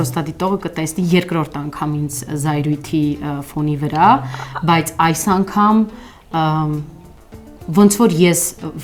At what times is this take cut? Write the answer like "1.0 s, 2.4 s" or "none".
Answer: none